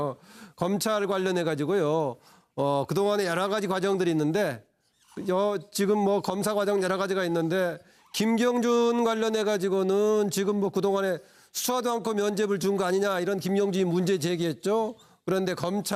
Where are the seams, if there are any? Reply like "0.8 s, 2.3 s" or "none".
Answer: none